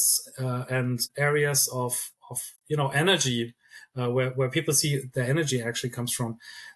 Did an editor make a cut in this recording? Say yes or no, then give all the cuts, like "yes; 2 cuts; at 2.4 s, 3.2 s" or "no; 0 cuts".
yes; 1 cut; at 1.1 s